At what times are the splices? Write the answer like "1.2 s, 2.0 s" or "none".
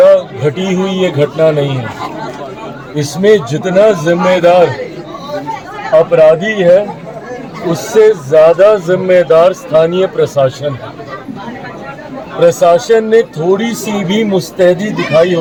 none